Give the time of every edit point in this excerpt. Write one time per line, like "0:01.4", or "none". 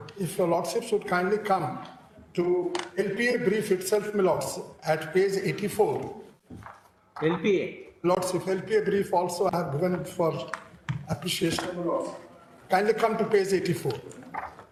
none